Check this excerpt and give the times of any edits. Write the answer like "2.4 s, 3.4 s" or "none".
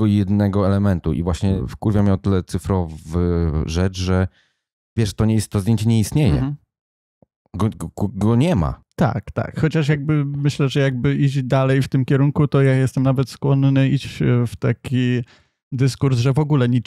1.6 s, 8.8 s